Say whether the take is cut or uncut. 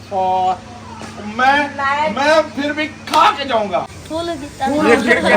cut